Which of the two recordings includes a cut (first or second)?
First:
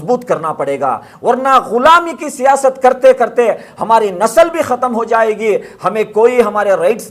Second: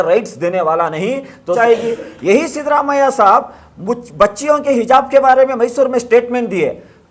second